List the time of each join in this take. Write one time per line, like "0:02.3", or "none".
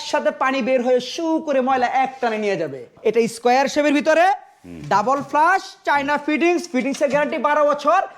0:02.9